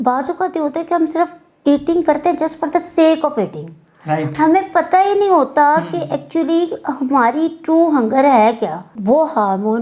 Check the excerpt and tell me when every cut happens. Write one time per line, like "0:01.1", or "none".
0:08.9